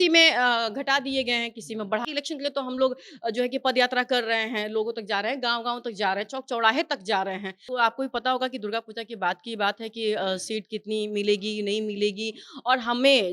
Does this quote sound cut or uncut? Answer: cut